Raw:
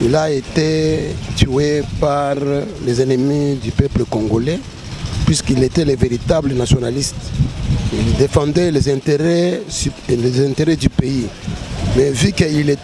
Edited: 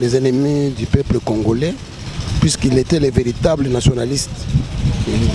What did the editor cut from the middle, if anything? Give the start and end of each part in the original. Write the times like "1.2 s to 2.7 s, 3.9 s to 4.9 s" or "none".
none